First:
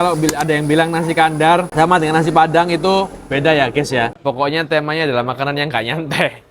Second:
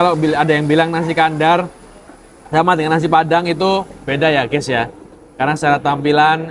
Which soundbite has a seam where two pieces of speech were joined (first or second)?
first